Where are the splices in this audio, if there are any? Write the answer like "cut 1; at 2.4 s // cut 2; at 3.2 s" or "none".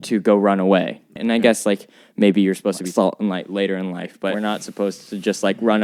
cut 1; at 1.1 s // cut 2; at 2.8 s // cut 3; at 4.4 s